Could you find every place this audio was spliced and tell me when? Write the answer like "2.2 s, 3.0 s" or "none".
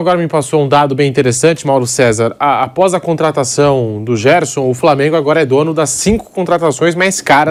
none